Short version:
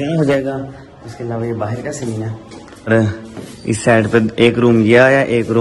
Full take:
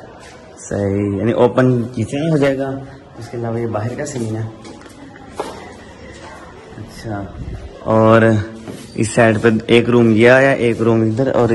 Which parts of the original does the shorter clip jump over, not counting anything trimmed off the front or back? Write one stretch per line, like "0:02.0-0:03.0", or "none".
0:05.0-0:08.2